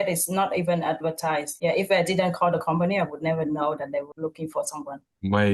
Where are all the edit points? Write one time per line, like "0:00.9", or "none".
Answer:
0:04.1